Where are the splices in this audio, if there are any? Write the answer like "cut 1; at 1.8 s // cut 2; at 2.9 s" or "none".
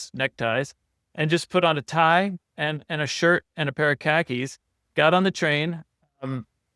none